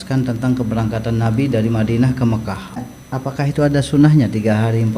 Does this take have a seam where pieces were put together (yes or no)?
yes